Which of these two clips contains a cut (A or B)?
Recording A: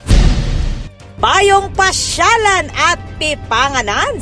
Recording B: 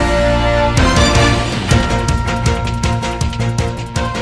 A